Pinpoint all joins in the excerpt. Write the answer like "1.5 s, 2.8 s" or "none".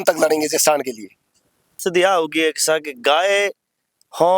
1.8 s